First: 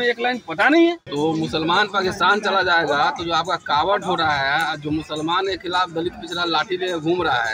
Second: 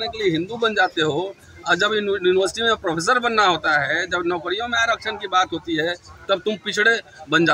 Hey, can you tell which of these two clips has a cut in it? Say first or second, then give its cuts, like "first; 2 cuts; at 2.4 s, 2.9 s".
first; 1 cut; at 1.0 s